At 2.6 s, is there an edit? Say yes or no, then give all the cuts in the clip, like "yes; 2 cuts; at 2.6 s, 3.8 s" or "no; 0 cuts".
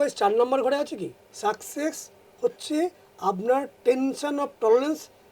no; 1 cut; at 1.2 s